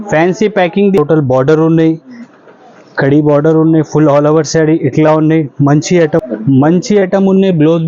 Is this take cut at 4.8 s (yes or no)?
no